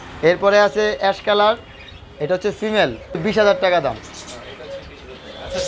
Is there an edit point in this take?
yes; 1 cut; at 3.2 s

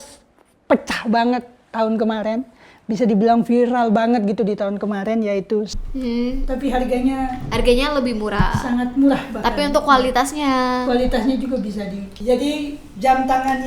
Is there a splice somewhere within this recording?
yes; 2 cuts; at 5.8 s, 12.1 s

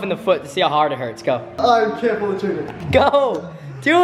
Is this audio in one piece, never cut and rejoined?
no; 2 cuts; at 1.5 s, 2.8 s

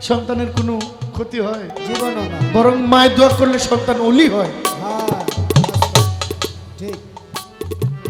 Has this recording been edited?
no; 0 cuts

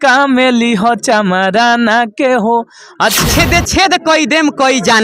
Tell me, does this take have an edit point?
yes; 1 cut; at 3.2 s

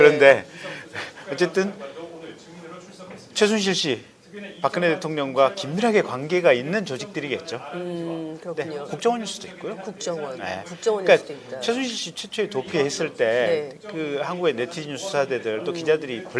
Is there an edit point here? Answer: yes; 1 cut; at 12.9 s

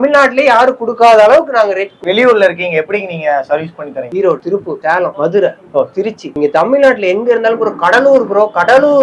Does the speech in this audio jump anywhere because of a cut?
yes; 1 cut; at 2.0 s

